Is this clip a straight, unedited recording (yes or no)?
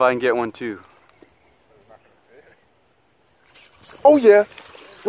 yes